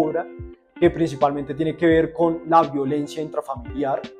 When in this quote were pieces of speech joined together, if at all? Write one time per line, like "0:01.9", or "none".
none